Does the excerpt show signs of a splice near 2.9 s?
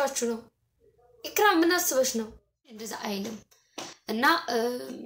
yes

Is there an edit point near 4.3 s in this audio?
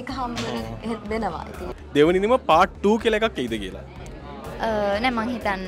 no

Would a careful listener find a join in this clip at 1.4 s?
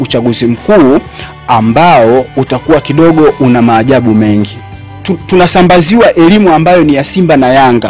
no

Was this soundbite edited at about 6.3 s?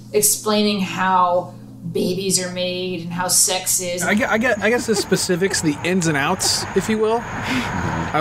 no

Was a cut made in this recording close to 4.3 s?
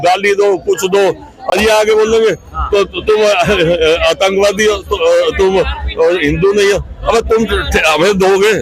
no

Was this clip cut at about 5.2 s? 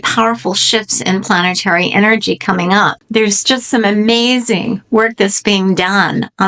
no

